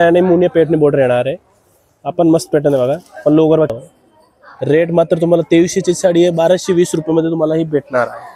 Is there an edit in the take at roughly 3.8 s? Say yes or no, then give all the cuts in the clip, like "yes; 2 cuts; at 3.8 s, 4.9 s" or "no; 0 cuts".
yes; 1 cut; at 3.8 s